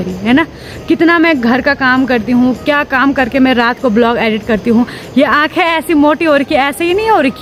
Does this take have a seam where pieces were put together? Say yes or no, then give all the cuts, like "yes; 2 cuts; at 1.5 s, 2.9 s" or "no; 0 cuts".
no; 0 cuts